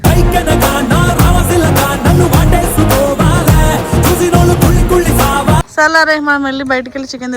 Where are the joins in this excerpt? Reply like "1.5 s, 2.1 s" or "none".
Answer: 5.7 s